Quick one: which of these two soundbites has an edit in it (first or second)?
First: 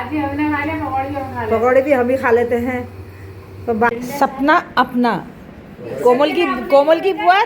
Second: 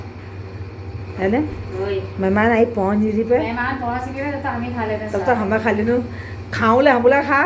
first